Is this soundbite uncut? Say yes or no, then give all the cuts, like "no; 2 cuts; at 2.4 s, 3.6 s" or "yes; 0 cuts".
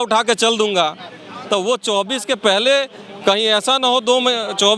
yes; 0 cuts